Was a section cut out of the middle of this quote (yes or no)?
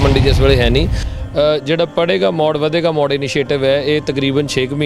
yes